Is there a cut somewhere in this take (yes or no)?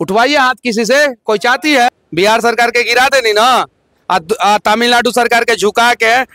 yes